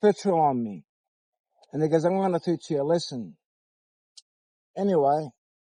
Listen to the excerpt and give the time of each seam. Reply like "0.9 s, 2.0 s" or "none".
none